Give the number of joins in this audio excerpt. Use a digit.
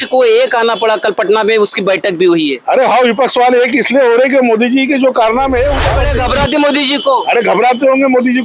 1